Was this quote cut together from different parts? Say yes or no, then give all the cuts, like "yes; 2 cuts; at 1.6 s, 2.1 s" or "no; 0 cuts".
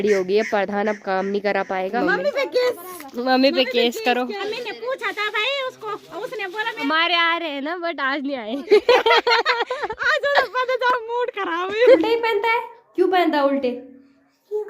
yes; 4 cuts; at 2.0 s, 4.4 s, 6.8 s, 12.0 s